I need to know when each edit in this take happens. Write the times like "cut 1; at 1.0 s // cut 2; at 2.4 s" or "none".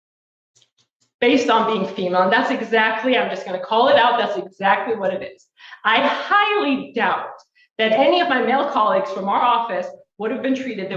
cut 1; at 8.9 s